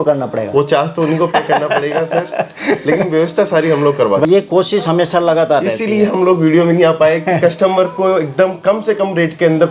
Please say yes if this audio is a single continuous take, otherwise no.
no